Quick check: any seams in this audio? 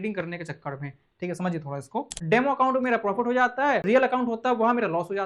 yes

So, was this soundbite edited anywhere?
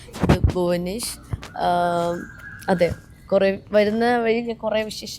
no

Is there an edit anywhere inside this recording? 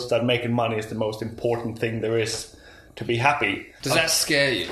yes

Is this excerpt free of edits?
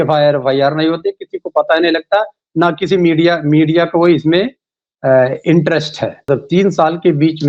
no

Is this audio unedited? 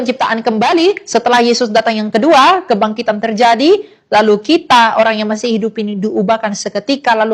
yes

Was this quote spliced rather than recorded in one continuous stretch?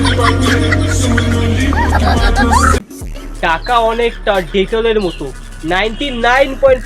yes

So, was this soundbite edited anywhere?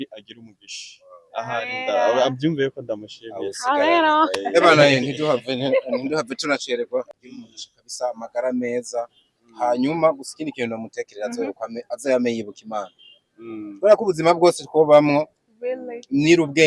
yes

